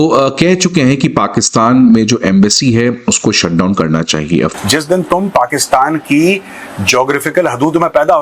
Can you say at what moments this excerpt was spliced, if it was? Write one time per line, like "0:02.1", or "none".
0:04.5